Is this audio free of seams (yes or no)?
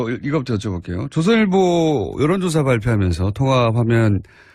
no